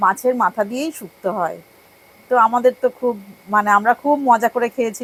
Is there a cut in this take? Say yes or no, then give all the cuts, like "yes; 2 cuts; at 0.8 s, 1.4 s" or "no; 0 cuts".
no; 0 cuts